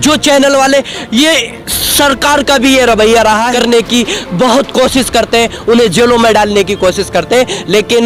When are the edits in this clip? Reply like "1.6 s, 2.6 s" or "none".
3.5 s